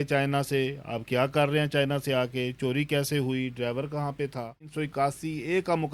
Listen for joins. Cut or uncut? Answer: cut